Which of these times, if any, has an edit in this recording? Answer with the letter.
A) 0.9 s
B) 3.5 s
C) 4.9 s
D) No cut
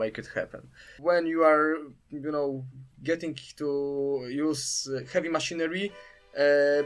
A